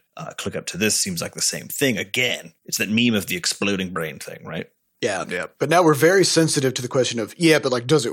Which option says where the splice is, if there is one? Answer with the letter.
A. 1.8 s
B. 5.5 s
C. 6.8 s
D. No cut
B